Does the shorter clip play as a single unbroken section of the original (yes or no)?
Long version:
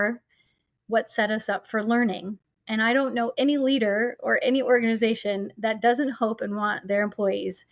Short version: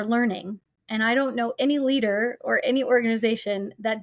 yes